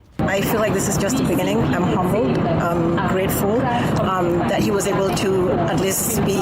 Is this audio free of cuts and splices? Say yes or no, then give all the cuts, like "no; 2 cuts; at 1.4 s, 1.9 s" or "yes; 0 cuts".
yes; 0 cuts